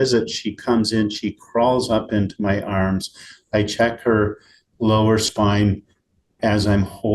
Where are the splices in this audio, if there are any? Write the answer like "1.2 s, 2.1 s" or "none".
none